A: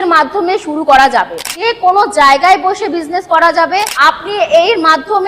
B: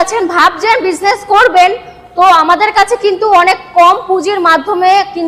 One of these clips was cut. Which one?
A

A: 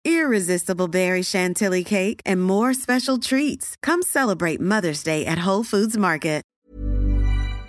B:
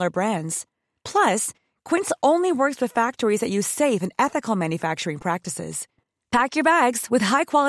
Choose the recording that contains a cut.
A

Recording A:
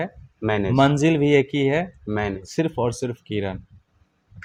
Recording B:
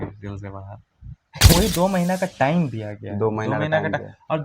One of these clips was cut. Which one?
B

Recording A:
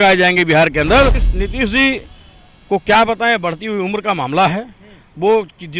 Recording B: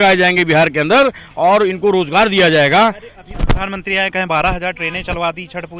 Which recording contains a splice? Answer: A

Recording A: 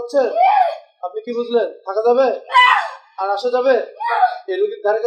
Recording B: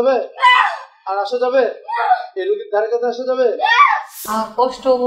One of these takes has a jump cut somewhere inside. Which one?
B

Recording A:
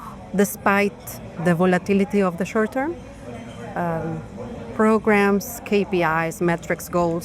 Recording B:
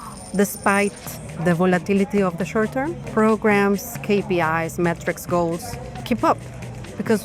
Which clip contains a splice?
B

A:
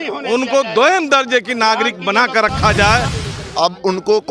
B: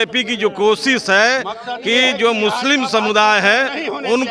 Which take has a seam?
A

